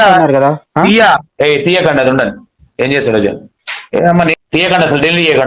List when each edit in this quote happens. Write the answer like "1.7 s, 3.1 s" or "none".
4.4 s

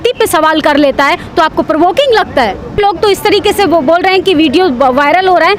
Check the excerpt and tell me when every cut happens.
2.7 s

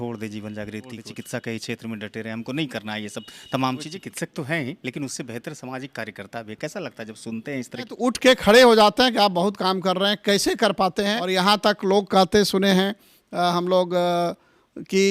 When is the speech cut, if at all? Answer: 1.1 s, 3.9 s, 8.0 s, 11.2 s

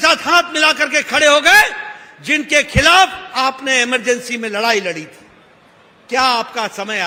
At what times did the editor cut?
none

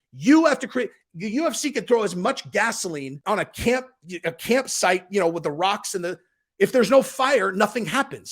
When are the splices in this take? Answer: 3.1 s

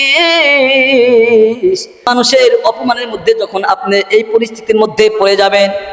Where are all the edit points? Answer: 2.2 s

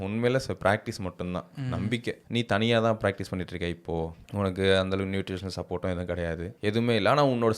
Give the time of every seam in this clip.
2.2 s

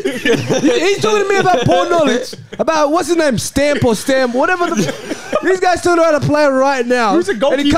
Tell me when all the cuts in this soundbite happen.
none

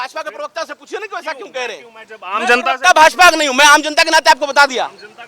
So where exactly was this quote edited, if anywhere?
none

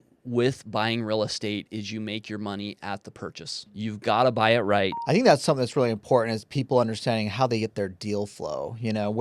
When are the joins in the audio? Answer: 3.8 s, 5.0 s

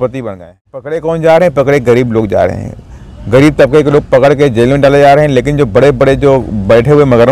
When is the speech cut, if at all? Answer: 0.9 s

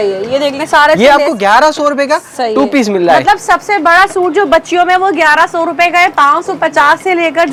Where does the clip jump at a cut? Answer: none

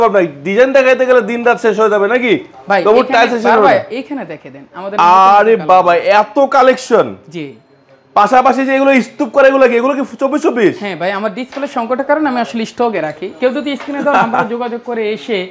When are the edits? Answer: none

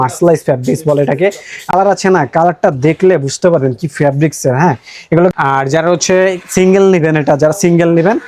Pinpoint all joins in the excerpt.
1.7 s, 5.3 s

